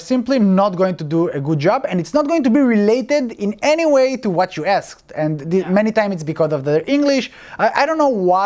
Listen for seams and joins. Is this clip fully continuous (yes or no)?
yes